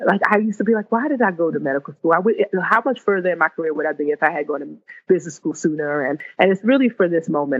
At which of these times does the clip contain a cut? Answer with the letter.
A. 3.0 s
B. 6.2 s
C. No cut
B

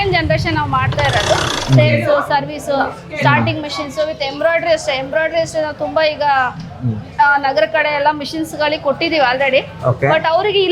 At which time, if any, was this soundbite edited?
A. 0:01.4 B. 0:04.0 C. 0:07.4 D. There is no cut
A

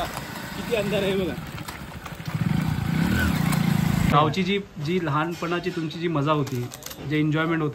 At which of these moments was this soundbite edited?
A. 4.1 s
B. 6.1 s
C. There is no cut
A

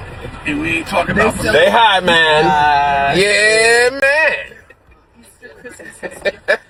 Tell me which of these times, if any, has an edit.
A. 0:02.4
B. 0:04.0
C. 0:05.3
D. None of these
D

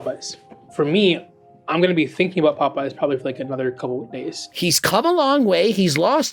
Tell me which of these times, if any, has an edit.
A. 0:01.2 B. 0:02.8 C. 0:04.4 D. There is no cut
C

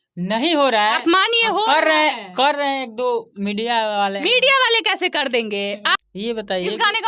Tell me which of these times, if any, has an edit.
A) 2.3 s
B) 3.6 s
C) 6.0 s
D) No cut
C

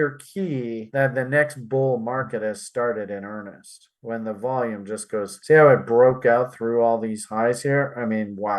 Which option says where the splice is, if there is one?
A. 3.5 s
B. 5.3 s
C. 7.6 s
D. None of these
B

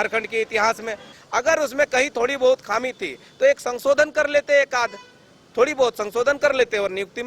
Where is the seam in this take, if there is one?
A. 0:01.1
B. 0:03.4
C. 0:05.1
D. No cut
A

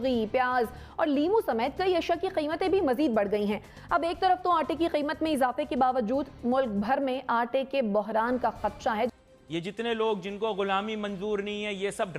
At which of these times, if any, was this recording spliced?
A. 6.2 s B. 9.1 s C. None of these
B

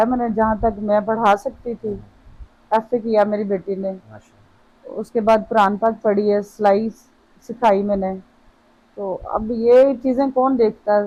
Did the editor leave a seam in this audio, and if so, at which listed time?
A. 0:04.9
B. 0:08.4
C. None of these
C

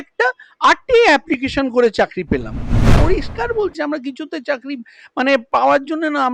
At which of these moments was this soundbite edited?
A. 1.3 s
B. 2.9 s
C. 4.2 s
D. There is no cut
B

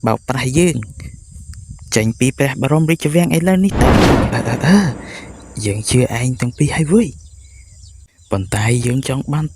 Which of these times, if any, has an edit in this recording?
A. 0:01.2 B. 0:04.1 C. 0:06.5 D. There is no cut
B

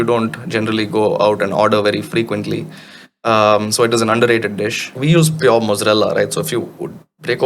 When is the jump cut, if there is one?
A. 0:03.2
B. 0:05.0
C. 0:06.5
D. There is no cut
B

